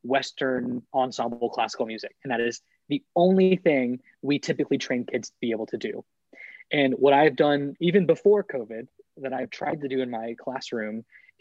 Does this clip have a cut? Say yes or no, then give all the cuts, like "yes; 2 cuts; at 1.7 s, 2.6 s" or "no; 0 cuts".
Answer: no; 0 cuts